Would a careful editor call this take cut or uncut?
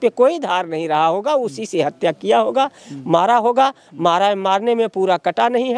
uncut